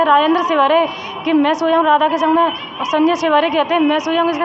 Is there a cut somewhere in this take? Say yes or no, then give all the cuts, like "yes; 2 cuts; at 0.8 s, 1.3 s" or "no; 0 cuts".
no; 0 cuts